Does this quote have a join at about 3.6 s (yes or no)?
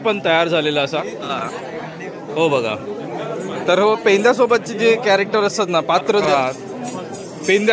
no